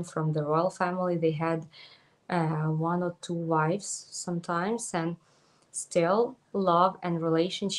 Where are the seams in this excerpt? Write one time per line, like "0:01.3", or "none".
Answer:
none